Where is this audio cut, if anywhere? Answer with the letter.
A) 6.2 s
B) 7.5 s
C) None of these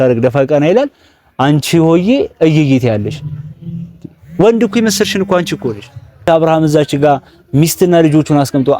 A